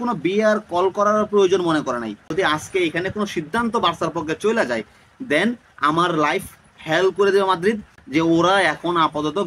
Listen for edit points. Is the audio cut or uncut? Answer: cut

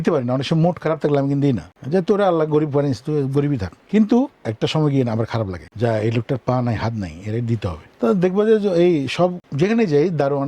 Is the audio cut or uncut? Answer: cut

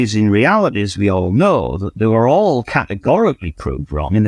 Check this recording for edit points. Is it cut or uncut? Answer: uncut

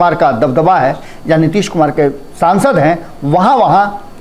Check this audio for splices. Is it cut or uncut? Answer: uncut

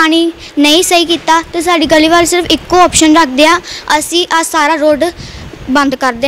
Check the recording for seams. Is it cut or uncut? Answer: uncut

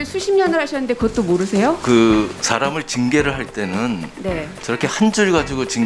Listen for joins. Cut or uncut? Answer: uncut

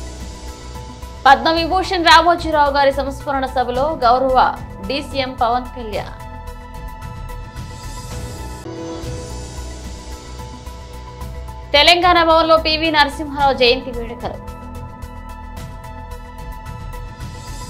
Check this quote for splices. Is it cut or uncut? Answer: uncut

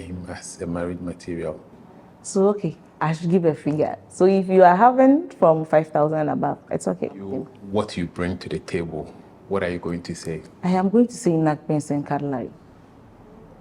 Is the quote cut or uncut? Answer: cut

